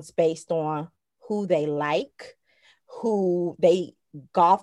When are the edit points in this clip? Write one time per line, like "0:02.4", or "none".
none